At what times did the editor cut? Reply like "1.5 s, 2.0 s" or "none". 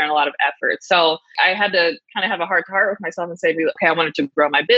1.3 s, 3.8 s